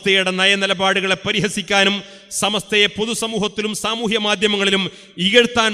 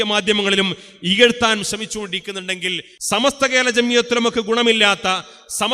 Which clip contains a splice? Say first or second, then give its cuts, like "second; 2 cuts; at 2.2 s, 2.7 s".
second; 1 cut; at 3.2 s